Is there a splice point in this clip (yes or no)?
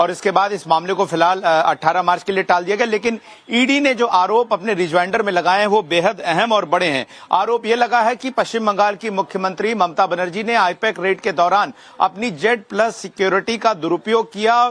no